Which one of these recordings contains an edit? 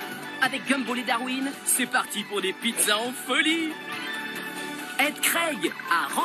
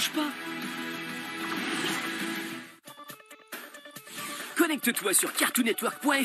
second; 1 cut; at 2.5 s

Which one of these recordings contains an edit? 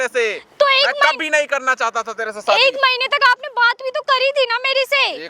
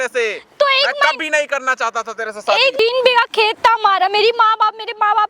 second; 1 cut; at 2.7 s

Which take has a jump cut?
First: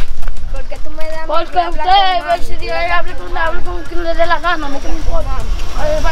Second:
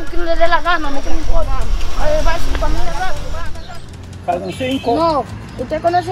second; 1 cut; at 3.5 s

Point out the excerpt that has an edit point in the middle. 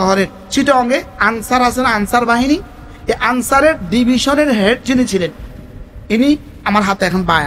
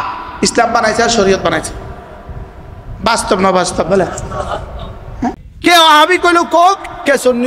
second; 1 cut; at 5.4 s

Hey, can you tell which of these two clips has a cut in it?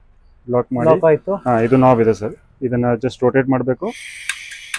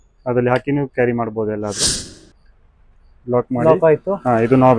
second; 1 cut; at 1.8 s

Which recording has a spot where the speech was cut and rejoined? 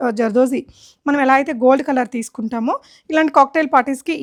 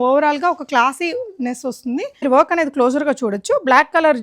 second; 1 cut; at 2.2 s

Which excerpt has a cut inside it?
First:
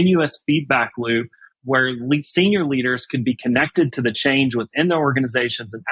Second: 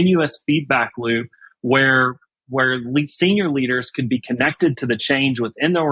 first; 1 cut; at 1.4 s

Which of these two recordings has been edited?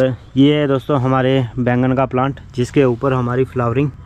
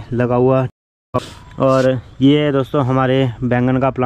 second; 1 cut; at 0.9 s

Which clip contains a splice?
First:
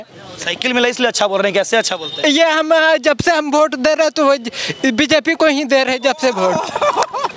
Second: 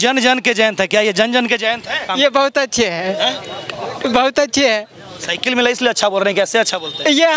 second; 1 cut; at 2.0 s

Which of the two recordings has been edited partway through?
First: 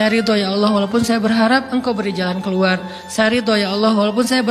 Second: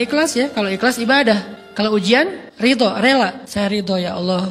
second; 3 cuts; at 1.6 s, 2.4 s, 3.4 s

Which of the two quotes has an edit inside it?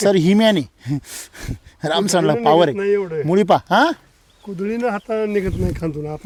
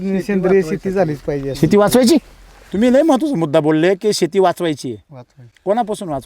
second; 1 cut; at 2.6 s

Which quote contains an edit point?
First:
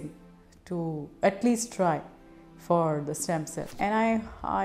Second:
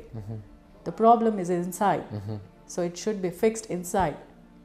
first; 1 cut; at 3.7 s

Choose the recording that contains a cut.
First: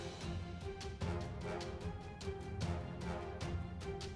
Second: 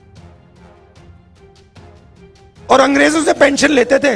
second; 1 cut; at 2.7 s

